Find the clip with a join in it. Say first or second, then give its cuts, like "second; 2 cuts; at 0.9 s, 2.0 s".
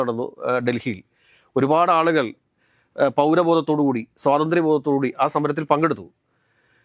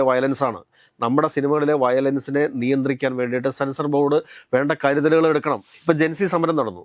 second; 1 cut; at 5.7 s